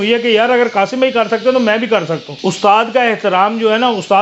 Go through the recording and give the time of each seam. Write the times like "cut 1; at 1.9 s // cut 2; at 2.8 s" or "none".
cut 1; at 2.2 s